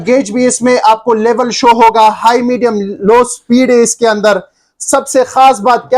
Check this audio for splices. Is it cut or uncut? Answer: uncut